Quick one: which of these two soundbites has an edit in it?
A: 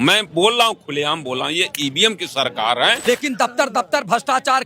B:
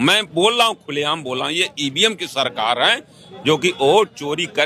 A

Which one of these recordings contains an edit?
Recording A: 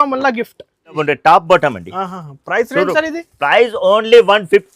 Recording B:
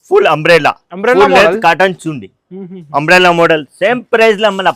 A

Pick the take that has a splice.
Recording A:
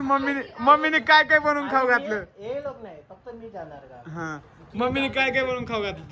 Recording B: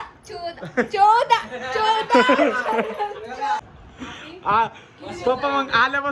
B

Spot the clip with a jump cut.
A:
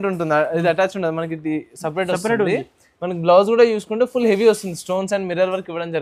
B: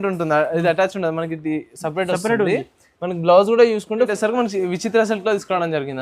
B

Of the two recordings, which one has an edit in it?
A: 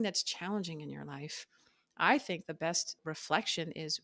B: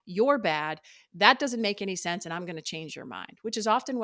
A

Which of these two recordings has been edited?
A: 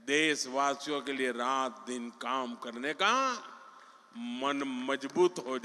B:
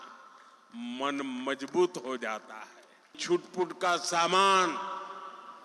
B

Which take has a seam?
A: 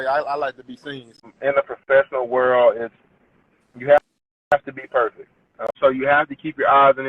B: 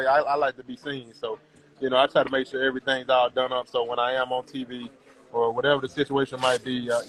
A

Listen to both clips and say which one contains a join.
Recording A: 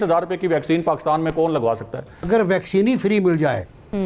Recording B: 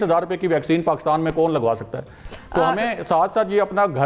A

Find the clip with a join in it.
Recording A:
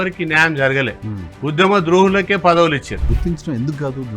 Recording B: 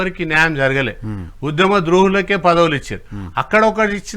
A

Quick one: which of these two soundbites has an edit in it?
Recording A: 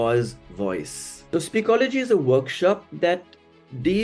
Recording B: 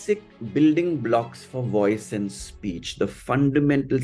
A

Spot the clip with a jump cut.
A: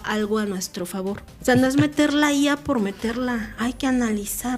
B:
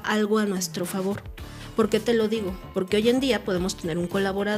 A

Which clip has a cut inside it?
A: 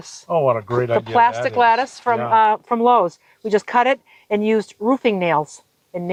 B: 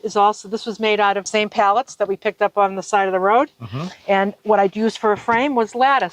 B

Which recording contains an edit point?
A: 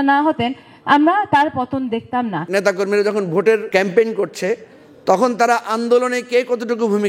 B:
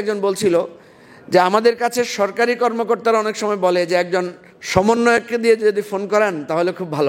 A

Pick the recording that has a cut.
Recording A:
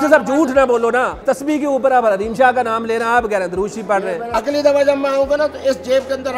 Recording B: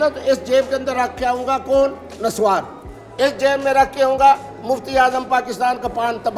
A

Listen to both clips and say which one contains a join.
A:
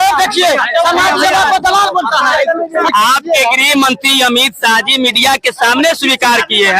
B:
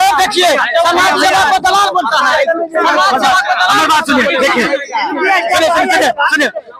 A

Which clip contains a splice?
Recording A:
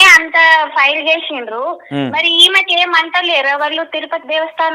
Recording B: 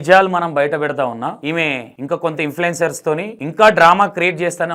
B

